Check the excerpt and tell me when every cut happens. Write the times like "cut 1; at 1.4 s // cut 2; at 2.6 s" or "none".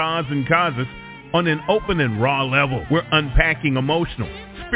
cut 1; at 2.8 s